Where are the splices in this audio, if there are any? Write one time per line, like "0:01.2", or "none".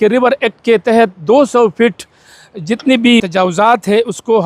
0:03.3